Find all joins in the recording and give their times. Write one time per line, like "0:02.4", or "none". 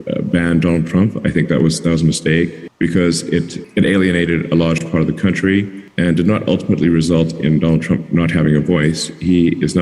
none